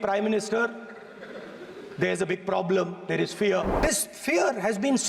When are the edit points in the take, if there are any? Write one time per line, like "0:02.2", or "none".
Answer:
0:03.7